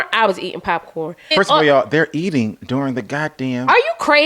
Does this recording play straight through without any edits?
no; 1 cut; at 1.3 s

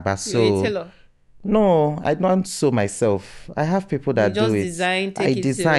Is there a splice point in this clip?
no; 0 cuts

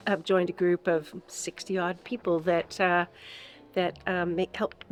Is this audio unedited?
yes; 0 cuts

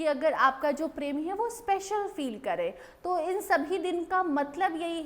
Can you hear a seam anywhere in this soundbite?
no; 0 cuts

